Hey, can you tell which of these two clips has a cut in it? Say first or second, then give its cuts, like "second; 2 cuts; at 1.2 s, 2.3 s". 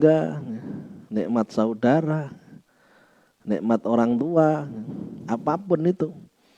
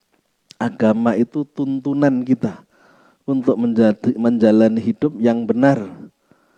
first; 1 cut; at 5.1 s